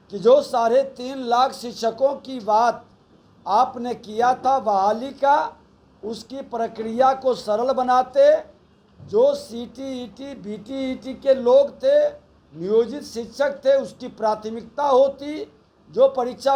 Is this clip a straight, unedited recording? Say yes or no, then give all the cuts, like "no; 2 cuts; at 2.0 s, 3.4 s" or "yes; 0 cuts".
yes; 0 cuts